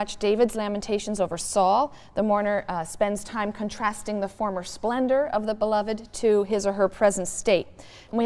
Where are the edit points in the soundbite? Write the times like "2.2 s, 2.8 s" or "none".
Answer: 2.5 s